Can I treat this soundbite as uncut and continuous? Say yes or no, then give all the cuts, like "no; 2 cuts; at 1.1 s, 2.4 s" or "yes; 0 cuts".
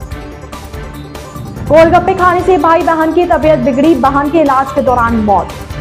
yes; 0 cuts